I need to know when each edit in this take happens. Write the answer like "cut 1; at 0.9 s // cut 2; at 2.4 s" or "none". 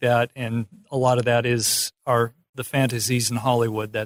none